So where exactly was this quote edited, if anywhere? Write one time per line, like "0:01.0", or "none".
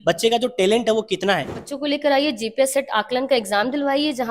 0:01.6